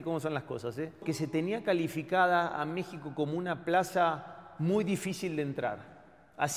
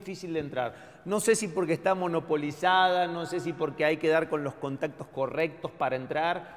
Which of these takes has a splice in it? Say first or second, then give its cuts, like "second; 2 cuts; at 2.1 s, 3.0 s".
first; 1 cut; at 1.0 s